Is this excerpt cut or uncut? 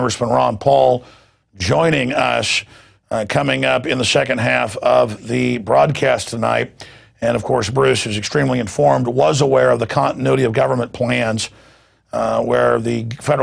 cut